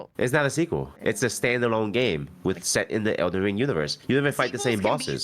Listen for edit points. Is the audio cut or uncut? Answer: cut